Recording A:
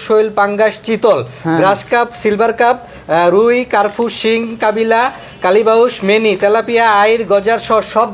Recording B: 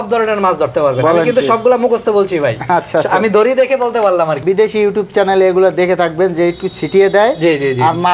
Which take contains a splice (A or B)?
B